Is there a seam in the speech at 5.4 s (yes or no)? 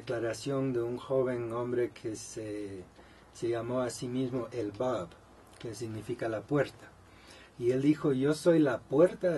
no